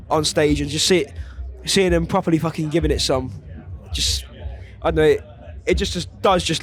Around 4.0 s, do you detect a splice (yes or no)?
no